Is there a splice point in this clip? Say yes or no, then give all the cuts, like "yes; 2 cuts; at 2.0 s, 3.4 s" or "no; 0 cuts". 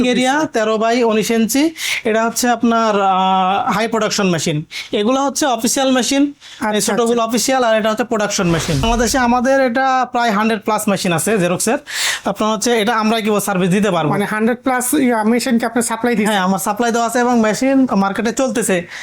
yes; 1 cut; at 8.8 s